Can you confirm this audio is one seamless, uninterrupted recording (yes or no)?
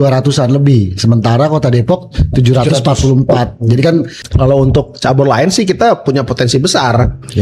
no